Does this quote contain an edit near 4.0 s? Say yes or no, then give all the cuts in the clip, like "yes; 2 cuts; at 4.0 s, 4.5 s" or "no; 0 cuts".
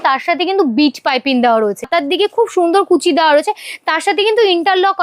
no; 1 cut; at 1.8 s